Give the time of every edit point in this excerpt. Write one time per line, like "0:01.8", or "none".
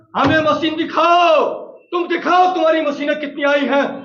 none